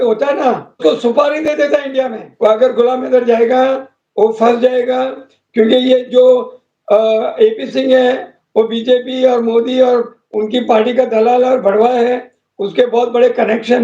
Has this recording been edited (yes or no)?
yes